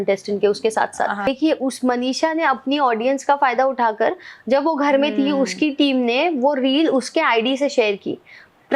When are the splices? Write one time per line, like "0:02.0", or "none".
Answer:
0:01.3